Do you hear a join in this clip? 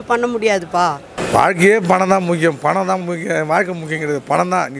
yes; 1 cut; at 1.1 s

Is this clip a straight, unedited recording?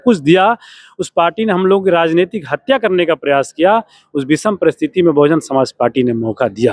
yes; 0 cuts

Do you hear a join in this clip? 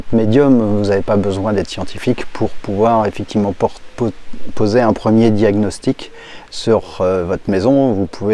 no; 0 cuts

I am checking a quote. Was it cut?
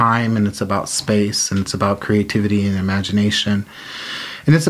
no; 0 cuts

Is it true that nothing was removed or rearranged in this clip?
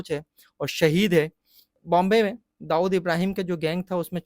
no; 1 cut; at 1.8 s

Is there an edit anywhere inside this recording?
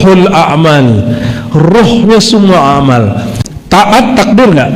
yes; 1 cut; at 3.3 s

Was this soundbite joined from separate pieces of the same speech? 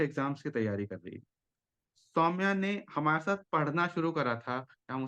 no; 0 cuts

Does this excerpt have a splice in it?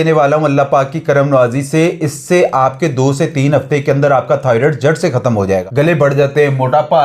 yes; 1 cut; at 5.6 s

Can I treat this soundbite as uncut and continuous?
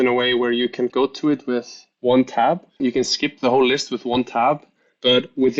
no; 2 cuts; at 0.9 s, 2.8 s

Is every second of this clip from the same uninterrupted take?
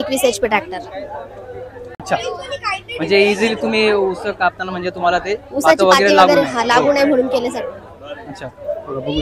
yes; 0 cuts

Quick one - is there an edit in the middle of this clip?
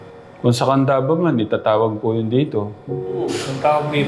no; 0 cuts

